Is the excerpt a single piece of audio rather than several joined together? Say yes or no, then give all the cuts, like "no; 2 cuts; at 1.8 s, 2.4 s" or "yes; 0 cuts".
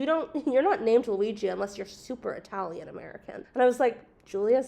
no; 1 cut; at 3.4 s